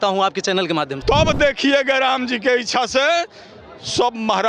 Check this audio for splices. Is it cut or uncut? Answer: cut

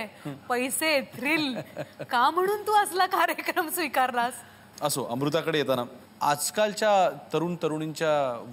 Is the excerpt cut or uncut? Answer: uncut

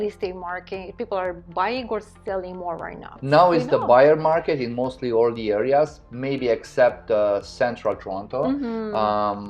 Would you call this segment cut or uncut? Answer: cut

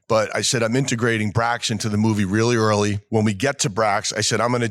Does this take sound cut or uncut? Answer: cut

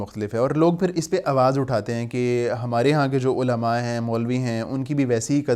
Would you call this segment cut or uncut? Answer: uncut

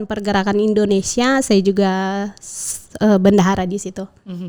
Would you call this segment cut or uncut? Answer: uncut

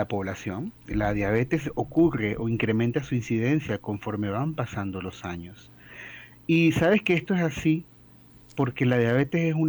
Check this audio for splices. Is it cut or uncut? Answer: uncut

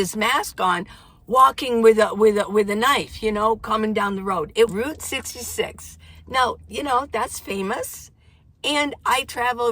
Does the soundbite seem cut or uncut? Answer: cut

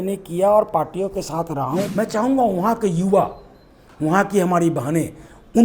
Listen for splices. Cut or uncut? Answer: cut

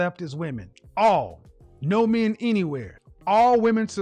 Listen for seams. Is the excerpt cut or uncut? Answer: uncut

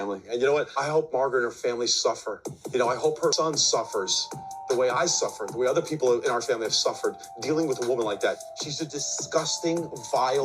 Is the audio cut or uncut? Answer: cut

